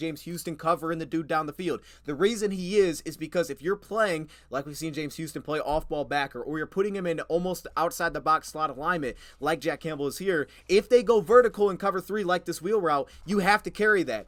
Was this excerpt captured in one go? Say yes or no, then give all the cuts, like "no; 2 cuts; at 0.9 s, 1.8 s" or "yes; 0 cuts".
yes; 0 cuts